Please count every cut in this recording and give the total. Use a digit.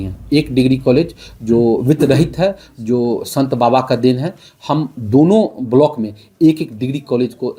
0